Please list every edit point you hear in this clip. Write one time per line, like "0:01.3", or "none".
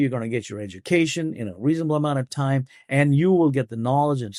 none